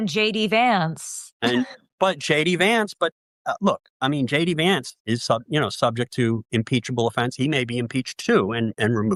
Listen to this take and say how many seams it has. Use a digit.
0